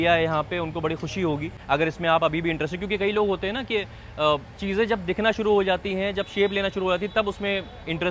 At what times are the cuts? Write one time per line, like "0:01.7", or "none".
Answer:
0:01.5